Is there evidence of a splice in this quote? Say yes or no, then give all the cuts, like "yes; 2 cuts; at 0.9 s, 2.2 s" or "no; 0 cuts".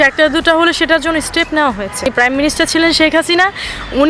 yes; 1 cut; at 2.1 s